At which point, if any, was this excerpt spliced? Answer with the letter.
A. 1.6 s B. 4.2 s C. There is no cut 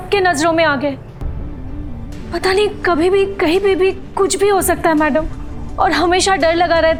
C